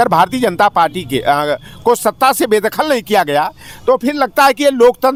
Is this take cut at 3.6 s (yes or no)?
no